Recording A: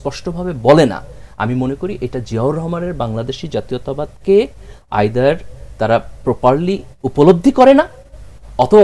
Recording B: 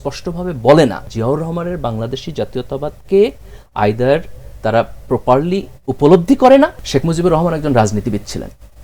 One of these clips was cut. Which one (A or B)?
B